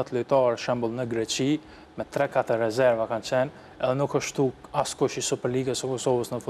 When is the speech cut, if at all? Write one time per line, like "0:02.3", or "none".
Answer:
none